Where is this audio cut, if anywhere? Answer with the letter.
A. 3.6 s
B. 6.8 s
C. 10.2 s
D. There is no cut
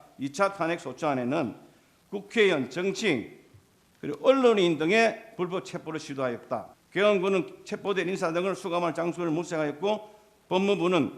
B